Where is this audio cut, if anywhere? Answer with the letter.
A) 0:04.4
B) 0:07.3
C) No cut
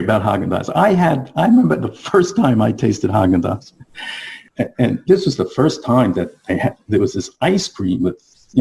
A